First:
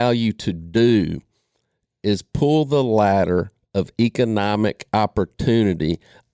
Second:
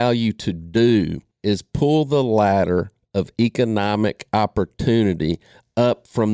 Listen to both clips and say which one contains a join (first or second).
second